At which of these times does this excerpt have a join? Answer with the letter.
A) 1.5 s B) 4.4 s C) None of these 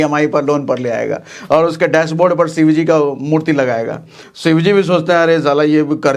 C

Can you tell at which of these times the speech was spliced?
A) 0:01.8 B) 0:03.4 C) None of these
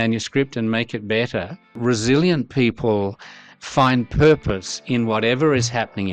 A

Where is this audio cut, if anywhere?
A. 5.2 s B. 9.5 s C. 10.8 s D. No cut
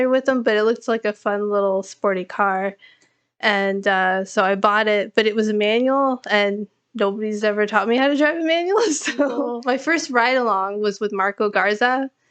B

